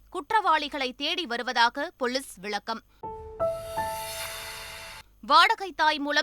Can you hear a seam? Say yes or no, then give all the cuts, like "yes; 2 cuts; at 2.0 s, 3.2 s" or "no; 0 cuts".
yes; 2 cuts; at 2.9 s, 5.2 s